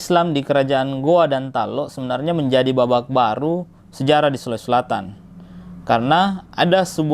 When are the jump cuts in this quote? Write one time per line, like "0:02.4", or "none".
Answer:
none